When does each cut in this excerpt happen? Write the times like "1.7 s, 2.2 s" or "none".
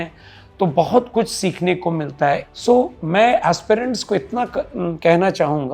2.5 s